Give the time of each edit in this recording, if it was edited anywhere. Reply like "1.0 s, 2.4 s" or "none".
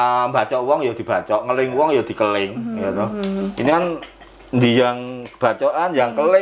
none